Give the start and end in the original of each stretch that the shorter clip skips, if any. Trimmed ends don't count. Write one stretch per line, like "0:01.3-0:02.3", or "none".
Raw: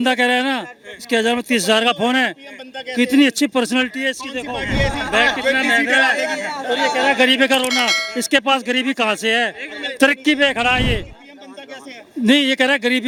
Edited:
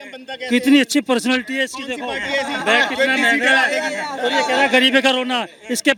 none